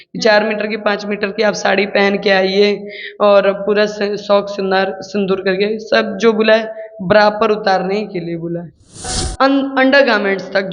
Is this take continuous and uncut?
no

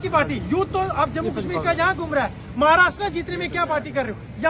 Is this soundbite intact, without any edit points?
yes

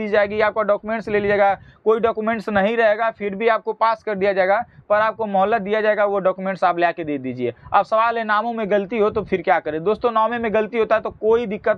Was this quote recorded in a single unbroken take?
yes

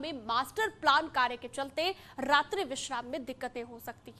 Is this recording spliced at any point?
no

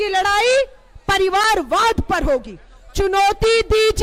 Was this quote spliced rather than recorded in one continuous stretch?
no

